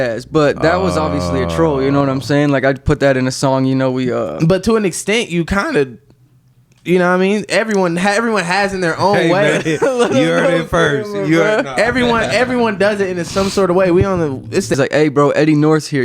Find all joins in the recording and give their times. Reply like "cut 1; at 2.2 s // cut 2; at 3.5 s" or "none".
cut 1; at 14.8 s